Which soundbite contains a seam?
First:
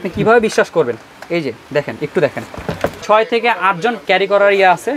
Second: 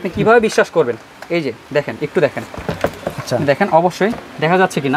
first; 1 cut; at 3.0 s

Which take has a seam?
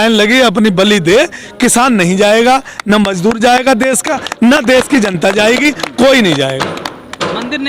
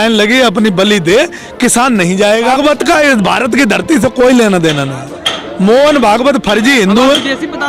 second; 1 cut; at 2.5 s

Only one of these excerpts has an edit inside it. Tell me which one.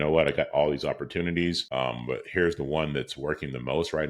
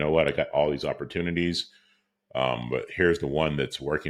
first; 1 cut; at 1.6 s

